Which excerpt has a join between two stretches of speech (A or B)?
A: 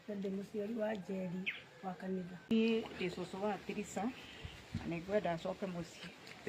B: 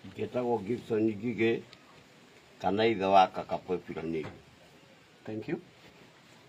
A